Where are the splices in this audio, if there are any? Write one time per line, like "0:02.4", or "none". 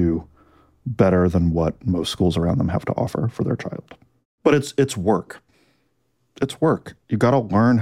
0:04.2